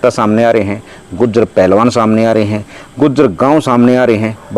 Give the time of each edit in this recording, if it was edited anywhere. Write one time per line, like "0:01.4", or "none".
none